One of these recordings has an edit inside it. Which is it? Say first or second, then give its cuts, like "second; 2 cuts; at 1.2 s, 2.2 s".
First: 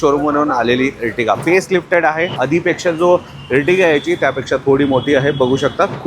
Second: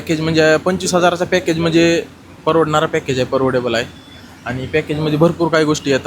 first; 2 cuts; at 1.4 s, 2.3 s